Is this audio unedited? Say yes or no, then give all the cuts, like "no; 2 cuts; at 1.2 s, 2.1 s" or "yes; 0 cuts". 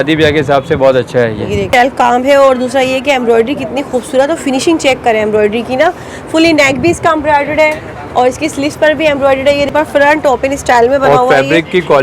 no; 2 cuts; at 1.7 s, 9.7 s